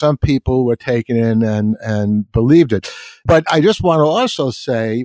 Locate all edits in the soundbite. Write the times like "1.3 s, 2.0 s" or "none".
3.3 s